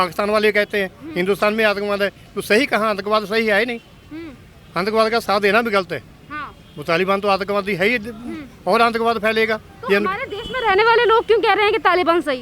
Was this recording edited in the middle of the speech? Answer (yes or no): no